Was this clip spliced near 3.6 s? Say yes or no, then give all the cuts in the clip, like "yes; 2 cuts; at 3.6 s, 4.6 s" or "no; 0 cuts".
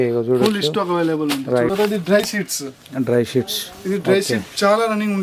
no; 1 cut; at 1.7 s